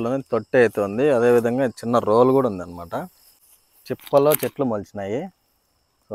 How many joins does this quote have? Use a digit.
1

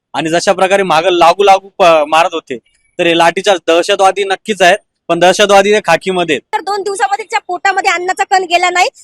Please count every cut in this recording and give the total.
1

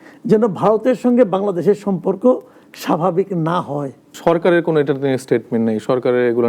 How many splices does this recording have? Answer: 1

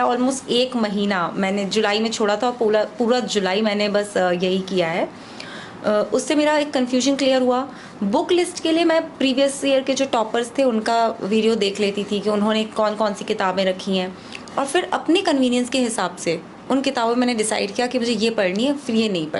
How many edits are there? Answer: 0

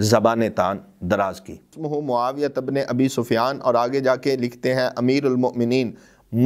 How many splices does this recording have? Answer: 1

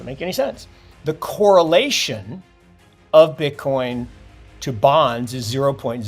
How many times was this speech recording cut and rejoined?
1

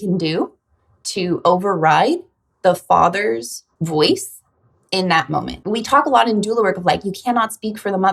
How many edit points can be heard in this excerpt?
2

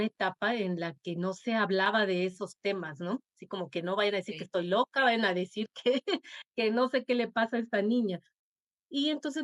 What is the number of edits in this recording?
0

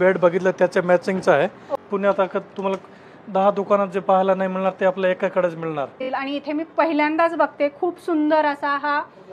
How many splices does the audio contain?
2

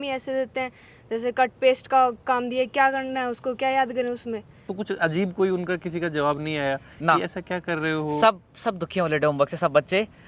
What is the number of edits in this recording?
1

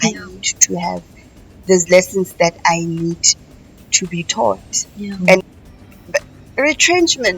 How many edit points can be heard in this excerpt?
1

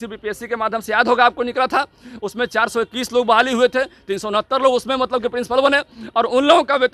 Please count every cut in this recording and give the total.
0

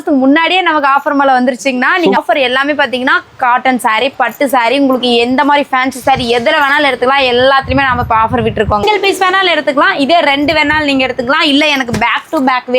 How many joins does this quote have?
2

